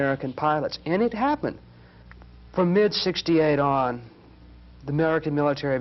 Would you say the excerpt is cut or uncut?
cut